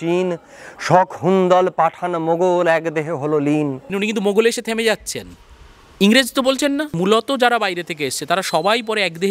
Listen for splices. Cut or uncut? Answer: cut